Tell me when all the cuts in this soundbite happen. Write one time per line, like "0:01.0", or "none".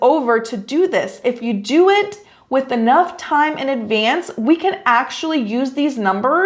0:01.2